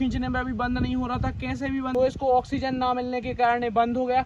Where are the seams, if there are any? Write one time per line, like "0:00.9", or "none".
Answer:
0:01.9